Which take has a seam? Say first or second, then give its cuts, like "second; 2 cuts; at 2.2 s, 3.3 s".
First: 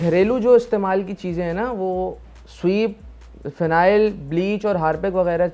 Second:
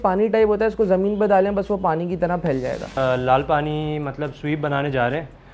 second; 1 cut; at 3.0 s